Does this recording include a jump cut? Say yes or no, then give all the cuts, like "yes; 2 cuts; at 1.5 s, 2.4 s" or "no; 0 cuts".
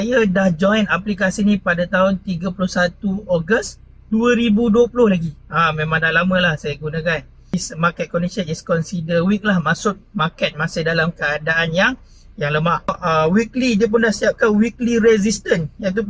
yes; 2 cuts; at 7.5 s, 13.0 s